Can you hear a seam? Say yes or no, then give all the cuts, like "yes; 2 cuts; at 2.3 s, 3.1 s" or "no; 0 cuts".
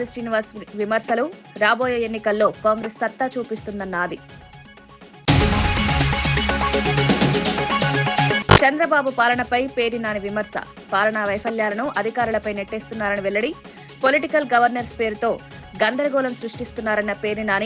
no; 0 cuts